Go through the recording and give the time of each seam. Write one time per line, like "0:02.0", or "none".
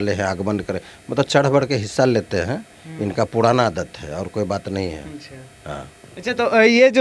none

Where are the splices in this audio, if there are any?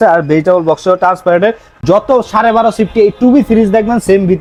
none

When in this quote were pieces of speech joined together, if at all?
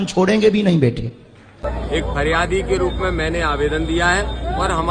0:01.6

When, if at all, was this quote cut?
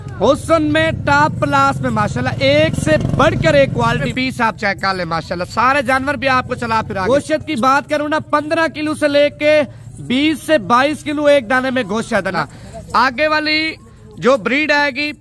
0:04.1
0:07.1
0:12.4

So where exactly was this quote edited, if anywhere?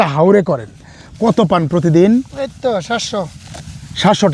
0:01.1

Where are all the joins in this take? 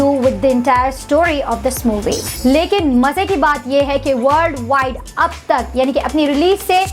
0:02.3

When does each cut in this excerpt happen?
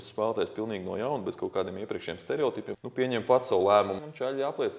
0:02.8
0:04.0

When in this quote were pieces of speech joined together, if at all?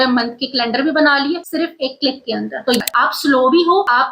0:02.8

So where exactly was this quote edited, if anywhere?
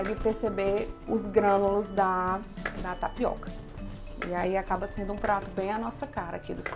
none

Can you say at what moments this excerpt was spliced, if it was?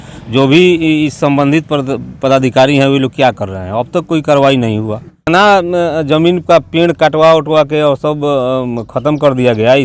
0:05.3

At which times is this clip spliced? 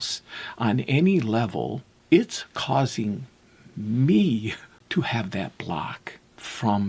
0:01.9
0:04.7

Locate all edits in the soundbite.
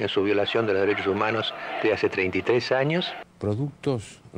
0:03.1

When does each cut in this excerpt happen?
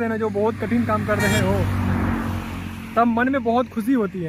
none

